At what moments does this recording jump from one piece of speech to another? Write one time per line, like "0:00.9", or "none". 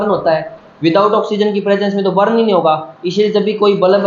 none

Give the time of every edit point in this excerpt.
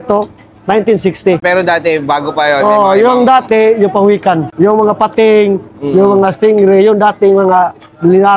0:01.4
0:04.5

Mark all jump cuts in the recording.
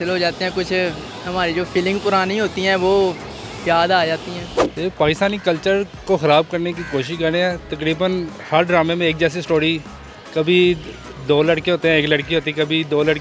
none

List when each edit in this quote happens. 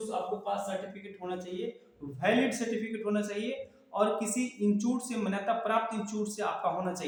none

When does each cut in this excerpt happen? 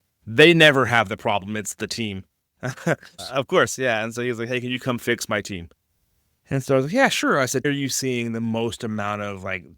0:03.2

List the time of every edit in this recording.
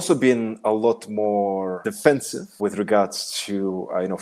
0:01.8
0:02.6

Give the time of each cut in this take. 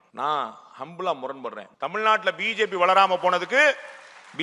0:01.7

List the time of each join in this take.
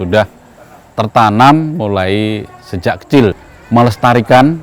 0:03.5

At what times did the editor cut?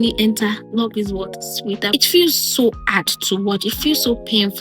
0:01.9

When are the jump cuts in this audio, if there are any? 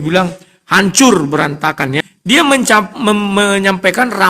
0:02.1

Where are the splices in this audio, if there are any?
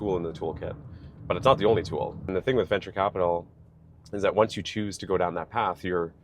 0:02.3

